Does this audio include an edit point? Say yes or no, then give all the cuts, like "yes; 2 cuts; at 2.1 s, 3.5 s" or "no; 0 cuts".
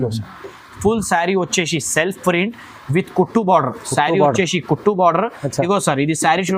no; 0 cuts